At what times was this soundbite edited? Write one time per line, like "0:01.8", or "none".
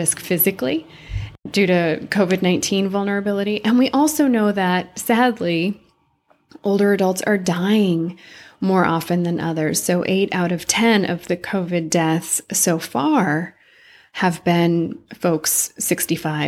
0:01.5